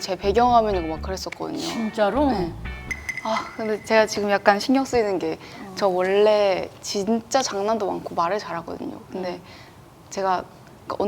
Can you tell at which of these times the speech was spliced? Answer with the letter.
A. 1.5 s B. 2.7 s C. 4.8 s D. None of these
B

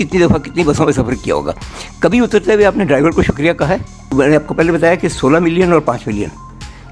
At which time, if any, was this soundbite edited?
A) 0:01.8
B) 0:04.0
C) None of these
B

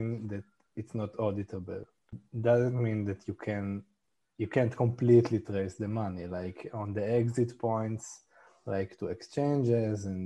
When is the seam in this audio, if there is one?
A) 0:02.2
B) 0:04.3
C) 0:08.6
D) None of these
A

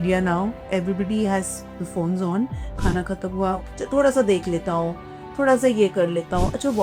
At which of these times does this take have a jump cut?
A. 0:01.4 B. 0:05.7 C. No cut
C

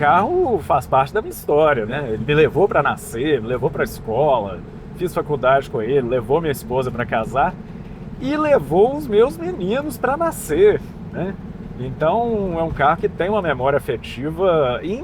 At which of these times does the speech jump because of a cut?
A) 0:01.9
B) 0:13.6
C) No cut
A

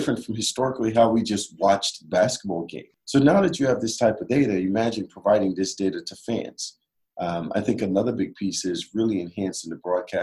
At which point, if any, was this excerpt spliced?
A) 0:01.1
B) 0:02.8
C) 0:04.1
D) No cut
B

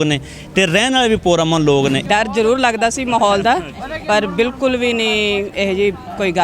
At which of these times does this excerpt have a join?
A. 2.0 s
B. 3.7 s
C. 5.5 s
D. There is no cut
A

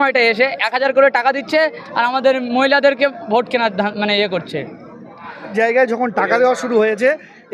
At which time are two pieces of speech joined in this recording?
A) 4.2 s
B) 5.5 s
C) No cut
B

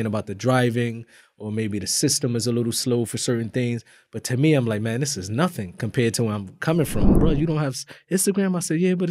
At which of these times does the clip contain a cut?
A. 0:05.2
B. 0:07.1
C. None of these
B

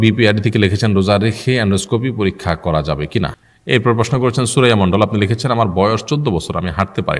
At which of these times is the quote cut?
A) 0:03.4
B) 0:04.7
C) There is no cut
A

